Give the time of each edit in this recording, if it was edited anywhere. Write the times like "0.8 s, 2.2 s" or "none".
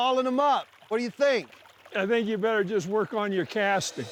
none

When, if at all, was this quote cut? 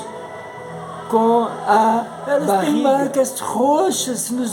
2.6 s

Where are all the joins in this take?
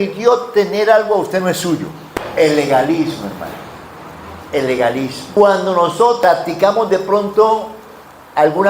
2.0 s

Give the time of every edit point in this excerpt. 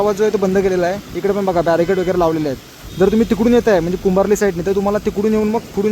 none

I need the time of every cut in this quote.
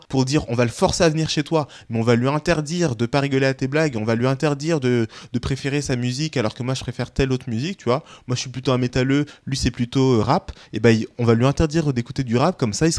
none

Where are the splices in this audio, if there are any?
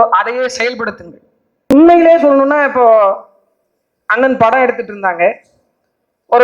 1.7 s

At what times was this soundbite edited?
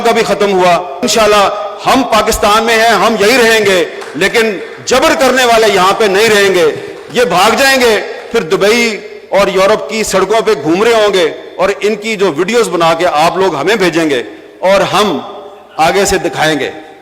0.9 s

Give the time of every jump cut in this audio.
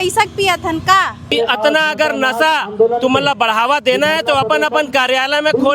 1.3 s

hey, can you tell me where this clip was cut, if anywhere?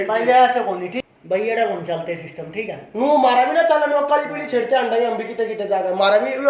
0.9 s

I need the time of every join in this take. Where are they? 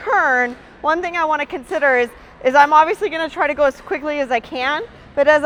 none

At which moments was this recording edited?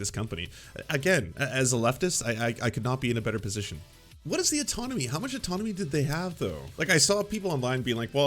4.2 s, 6.7 s

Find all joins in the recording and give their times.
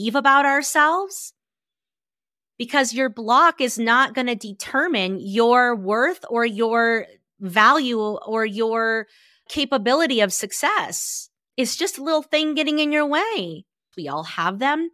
13.9 s

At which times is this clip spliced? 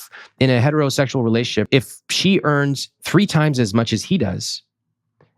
1.7 s

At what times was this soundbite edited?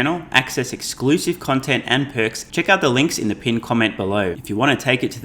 2.4 s, 4.4 s

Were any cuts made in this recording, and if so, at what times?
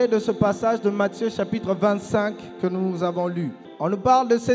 3.6 s

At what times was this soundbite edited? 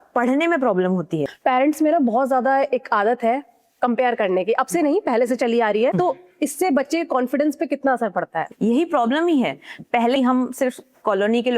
1.3 s, 5.9 s, 8.4 s, 10.2 s

